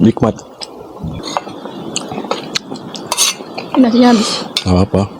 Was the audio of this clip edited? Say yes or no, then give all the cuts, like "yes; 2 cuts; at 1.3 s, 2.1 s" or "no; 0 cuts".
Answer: yes; 1 cut; at 1.2 s